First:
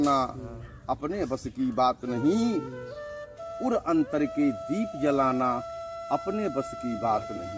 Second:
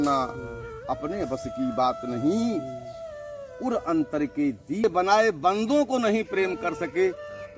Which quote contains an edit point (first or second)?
second